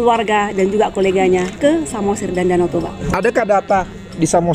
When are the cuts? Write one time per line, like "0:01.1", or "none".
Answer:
0:02.9

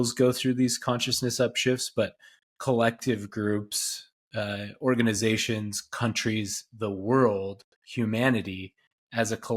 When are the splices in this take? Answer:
none

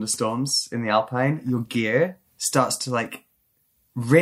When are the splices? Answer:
0:01.4

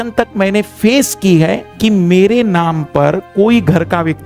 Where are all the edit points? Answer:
0:01.7

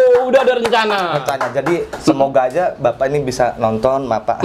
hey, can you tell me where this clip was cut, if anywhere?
none

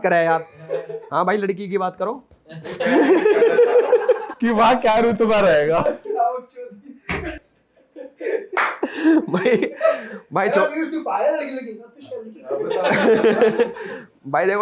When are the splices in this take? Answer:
none

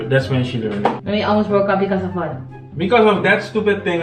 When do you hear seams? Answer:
0:01.0

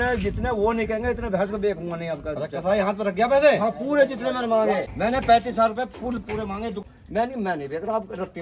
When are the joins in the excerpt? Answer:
0:04.9
0:06.8

